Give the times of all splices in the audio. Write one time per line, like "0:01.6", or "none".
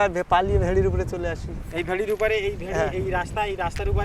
none